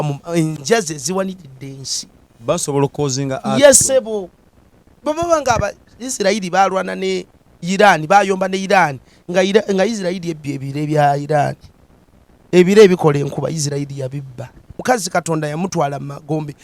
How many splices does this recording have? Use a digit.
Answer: 1